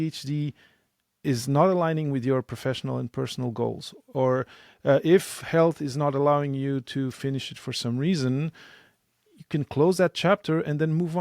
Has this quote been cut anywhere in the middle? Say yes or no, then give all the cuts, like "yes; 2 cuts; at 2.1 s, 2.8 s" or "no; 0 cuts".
no; 0 cuts